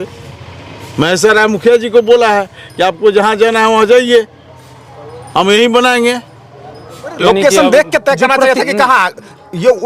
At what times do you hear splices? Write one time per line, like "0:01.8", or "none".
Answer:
0:07.2